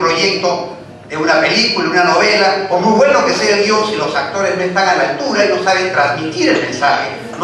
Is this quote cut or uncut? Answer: uncut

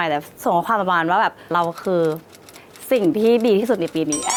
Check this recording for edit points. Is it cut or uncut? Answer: uncut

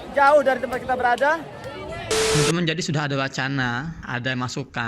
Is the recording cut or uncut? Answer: cut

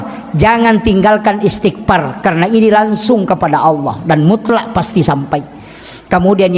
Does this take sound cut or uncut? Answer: uncut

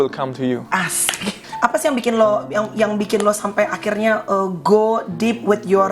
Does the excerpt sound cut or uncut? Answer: cut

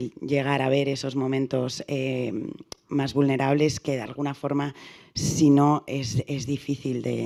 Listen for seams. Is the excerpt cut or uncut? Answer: uncut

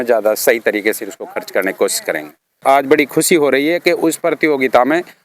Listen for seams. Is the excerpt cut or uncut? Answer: cut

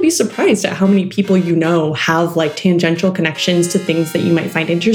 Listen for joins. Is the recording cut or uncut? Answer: uncut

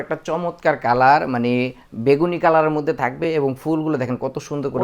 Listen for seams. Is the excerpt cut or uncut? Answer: uncut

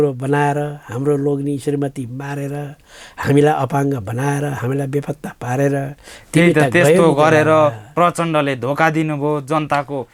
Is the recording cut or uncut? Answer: uncut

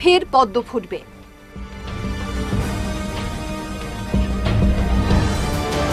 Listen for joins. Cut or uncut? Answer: uncut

